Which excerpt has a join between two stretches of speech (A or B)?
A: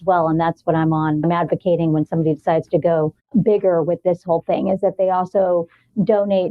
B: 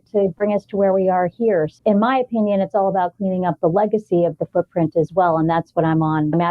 B